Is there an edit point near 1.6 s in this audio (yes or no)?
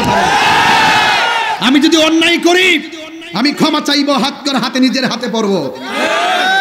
yes